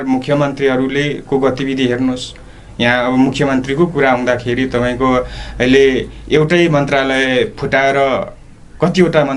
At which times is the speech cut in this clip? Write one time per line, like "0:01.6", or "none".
none